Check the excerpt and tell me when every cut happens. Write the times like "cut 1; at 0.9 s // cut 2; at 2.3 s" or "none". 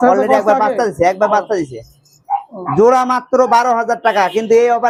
none